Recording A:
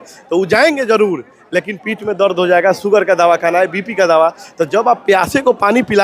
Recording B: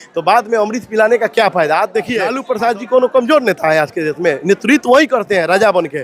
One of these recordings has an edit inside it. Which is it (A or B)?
B